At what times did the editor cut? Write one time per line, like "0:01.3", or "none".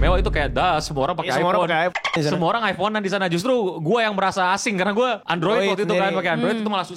0:05.2